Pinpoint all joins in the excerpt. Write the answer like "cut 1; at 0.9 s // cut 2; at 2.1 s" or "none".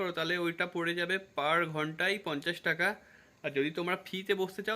none